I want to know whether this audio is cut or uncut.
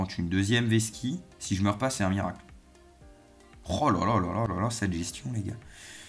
uncut